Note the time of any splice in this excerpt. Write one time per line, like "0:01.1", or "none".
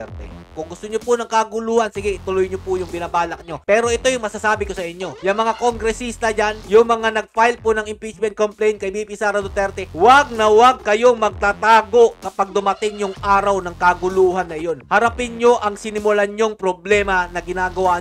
none